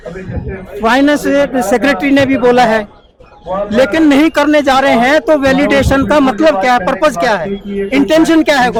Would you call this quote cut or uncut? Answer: uncut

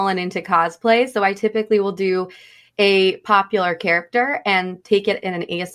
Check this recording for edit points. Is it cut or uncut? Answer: uncut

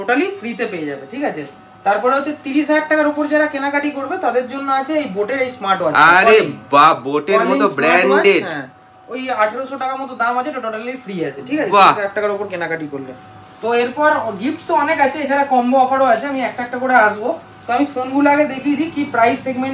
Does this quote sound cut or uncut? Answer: uncut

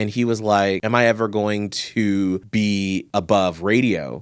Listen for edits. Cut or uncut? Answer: cut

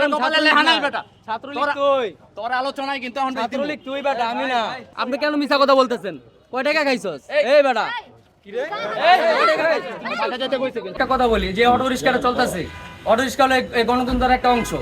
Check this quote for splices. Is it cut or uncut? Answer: cut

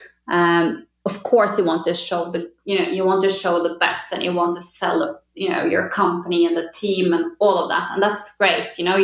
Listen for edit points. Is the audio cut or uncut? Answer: uncut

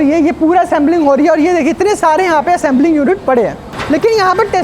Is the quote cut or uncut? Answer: cut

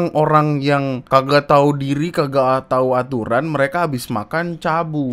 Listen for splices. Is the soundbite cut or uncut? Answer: cut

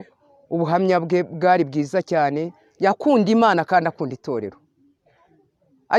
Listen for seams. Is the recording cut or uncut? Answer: uncut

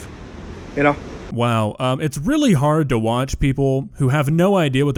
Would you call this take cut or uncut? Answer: uncut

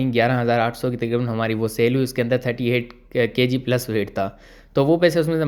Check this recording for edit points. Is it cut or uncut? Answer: uncut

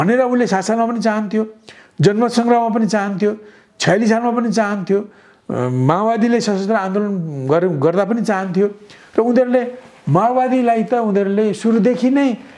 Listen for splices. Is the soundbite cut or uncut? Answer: uncut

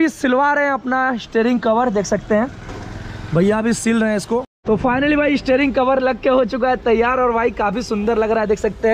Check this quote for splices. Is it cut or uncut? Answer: cut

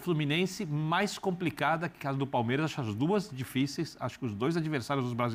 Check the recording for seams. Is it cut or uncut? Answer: uncut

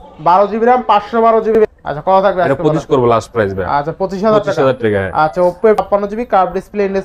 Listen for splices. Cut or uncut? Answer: cut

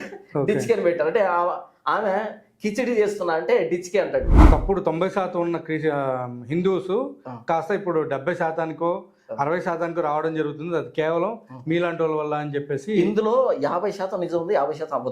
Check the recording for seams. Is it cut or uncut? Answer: cut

